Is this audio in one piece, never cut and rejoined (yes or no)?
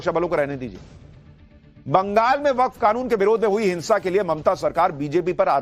no